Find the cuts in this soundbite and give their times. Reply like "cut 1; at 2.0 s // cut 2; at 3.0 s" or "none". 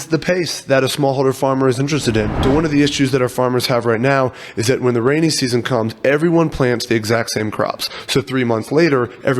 cut 1; at 2.3 s